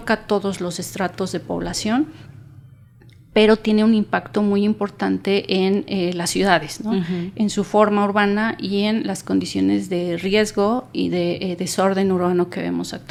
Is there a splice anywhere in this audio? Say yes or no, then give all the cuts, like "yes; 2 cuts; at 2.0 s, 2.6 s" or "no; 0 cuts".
no; 0 cuts